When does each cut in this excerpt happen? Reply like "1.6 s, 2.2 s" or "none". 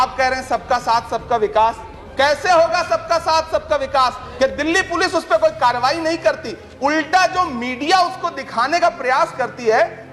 4.2 s